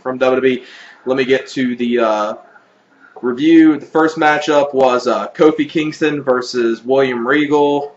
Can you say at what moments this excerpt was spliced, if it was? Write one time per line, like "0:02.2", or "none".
0:05.1